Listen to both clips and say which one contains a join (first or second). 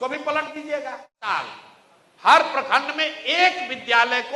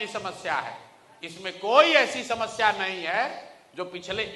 first